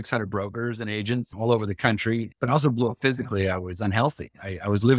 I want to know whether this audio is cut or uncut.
cut